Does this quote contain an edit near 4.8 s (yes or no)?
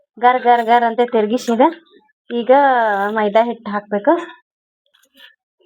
yes